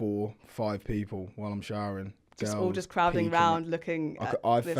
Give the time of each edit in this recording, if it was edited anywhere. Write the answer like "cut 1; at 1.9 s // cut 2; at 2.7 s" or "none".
none